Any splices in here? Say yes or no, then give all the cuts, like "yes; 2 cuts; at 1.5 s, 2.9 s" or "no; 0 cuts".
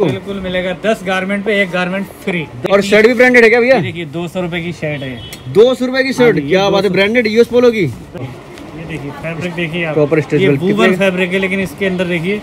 yes; 2 cuts; at 2.7 s, 8.2 s